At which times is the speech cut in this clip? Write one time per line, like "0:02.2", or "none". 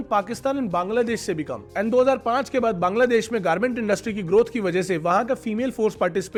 none